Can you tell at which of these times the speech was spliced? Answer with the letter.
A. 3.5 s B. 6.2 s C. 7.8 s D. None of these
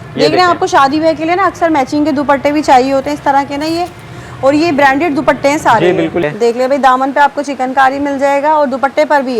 B